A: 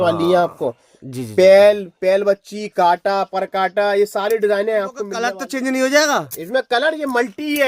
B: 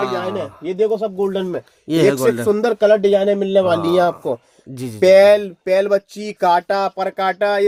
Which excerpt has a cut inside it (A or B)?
A